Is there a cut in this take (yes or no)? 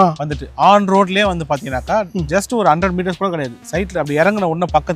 no